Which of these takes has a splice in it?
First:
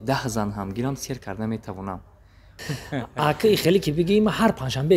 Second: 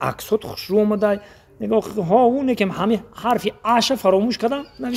first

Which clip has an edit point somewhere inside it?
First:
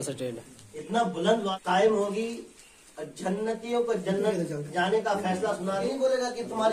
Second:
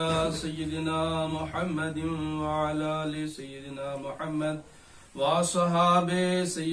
first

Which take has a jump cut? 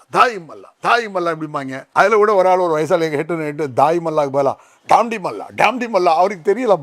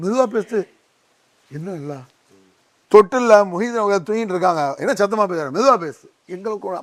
first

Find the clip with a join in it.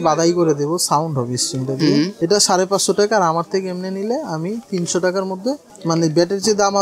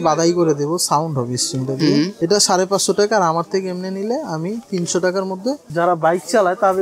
second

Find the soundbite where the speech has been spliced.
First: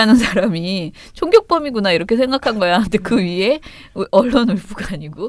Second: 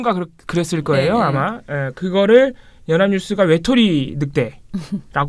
first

